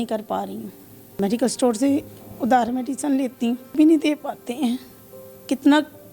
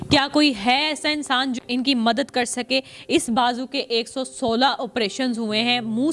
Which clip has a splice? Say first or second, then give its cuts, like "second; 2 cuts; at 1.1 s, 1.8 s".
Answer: first; 2 cuts; at 1.2 s, 3.7 s